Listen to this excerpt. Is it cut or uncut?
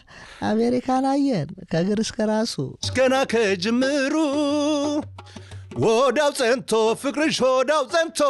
cut